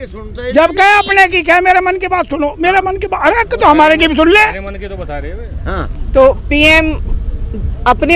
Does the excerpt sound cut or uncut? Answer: uncut